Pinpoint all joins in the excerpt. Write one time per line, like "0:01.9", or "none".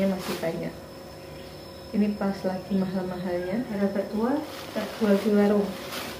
0:03.7